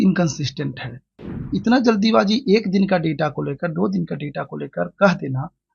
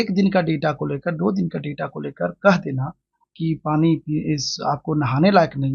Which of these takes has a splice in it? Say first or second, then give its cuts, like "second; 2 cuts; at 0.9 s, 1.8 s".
first; 1 cut; at 1.5 s